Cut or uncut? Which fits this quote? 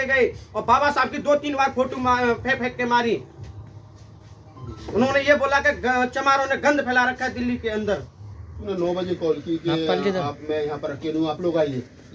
cut